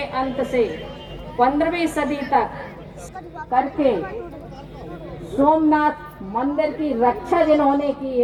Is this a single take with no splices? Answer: yes; 0 cuts

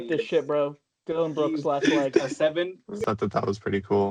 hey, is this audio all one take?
no; 1 cut; at 3.0 s

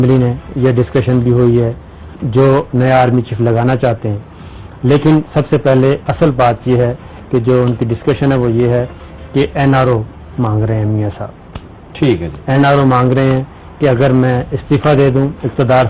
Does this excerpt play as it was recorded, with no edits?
no; 1 cut; at 7.9 s

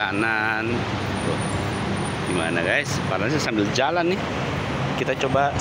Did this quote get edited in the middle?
no; 0 cuts

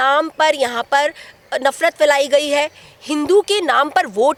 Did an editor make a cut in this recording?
no; 0 cuts

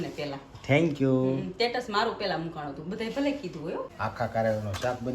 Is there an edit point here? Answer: yes; 1 cut; at 3.9 s

